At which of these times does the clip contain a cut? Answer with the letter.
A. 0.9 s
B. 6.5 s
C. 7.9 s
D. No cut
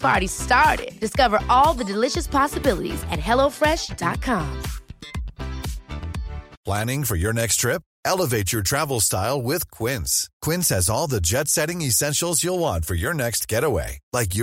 B